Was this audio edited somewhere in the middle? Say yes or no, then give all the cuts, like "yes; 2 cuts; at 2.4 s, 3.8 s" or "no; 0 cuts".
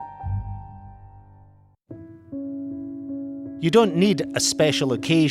yes; 1 cut; at 1.8 s